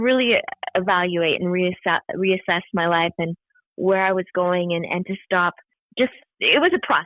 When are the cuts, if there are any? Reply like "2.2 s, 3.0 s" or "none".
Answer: 6.0 s